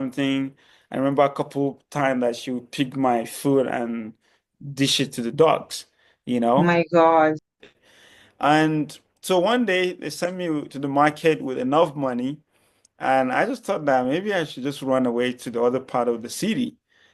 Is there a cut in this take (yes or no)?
no